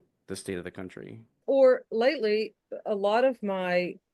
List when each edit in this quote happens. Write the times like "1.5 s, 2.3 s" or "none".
1.3 s